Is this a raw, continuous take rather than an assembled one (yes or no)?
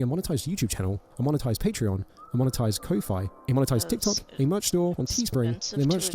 yes